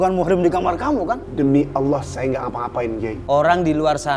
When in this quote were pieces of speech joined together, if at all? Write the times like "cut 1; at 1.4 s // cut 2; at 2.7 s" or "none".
cut 1; at 1.2 s // cut 2; at 3.1 s